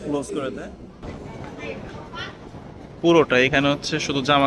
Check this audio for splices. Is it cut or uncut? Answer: cut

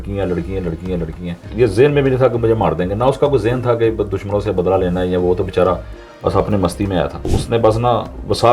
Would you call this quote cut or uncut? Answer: cut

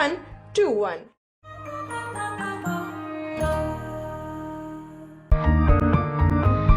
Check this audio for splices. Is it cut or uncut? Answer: cut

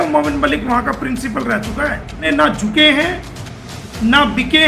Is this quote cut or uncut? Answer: cut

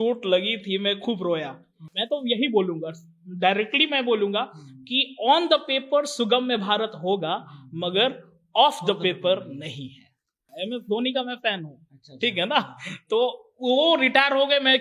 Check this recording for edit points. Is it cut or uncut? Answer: cut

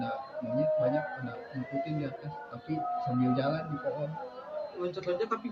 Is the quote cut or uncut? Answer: uncut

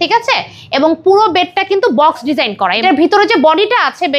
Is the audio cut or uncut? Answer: uncut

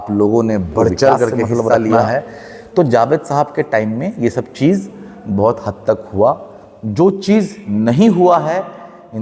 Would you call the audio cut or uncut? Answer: cut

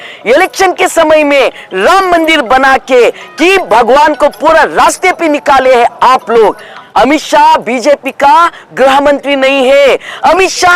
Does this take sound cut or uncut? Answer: cut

